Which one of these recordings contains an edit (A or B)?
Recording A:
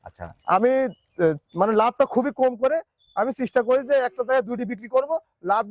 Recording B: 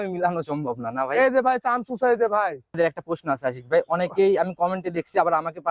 B